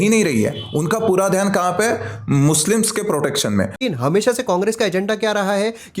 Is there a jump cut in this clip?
yes; 1 cut; at 3.8 s

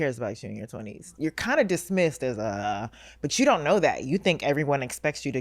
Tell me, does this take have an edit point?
yes; 1 cut; at 1.0 s

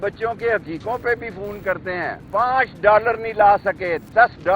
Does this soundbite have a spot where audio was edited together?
yes; 1 cut; at 2.2 s

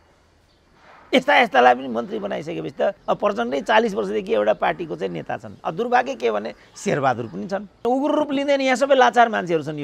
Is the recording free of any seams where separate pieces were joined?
no; 2 cuts; at 3.0 s, 7.8 s

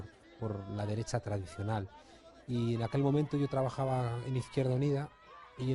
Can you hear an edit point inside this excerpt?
yes; 1 cut; at 3.8 s

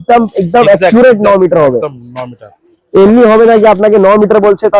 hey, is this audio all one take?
yes; 0 cuts

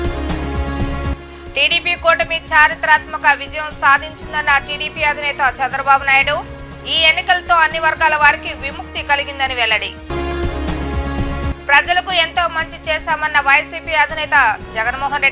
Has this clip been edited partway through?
yes; 1 cut; at 1.2 s

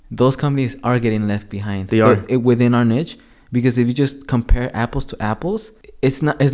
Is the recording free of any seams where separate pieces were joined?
yes; 0 cuts

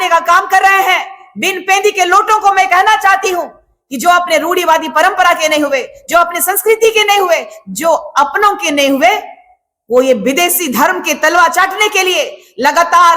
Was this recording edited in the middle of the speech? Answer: no; 0 cuts

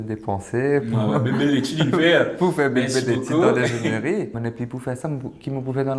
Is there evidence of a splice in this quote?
no; 0 cuts

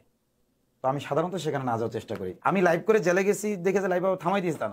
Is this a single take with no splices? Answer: no; 1 cut; at 2.3 s

